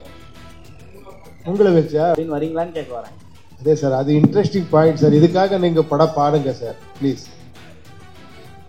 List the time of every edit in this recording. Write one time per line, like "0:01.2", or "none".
0:02.2